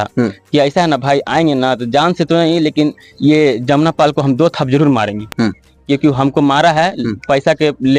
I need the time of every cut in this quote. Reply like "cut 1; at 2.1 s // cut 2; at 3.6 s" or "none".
none